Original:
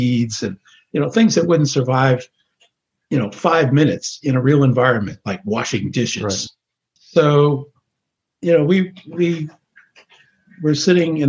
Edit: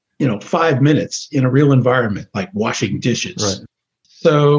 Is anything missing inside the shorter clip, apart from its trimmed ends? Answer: no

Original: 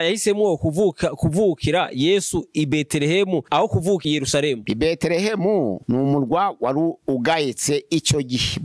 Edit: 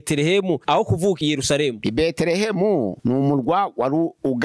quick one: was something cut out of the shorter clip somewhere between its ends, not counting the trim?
no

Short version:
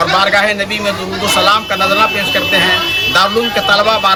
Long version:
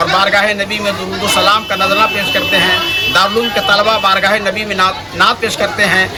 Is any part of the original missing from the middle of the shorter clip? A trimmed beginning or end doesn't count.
no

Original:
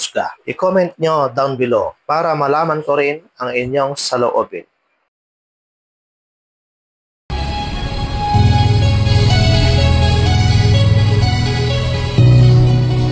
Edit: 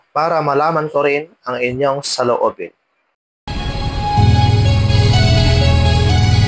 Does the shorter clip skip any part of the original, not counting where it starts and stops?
yes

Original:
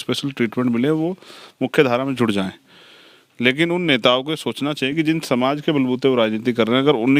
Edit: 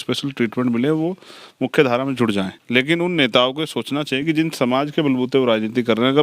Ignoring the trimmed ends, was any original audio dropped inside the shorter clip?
yes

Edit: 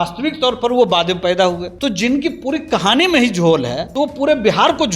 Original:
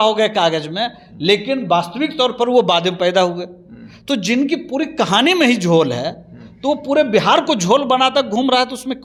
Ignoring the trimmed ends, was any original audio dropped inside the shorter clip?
yes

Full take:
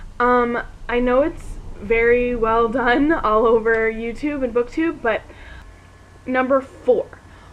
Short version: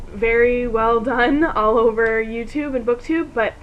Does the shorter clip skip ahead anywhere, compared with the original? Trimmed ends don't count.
no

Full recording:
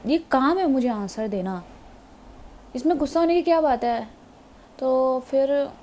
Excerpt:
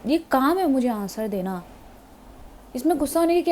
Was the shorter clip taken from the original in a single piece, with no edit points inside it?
yes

